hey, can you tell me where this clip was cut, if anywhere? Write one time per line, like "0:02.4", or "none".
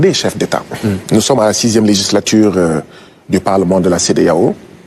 0:01.0